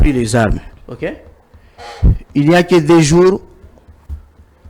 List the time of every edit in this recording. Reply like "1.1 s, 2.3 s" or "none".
none